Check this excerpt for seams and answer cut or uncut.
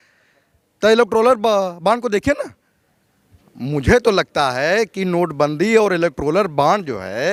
uncut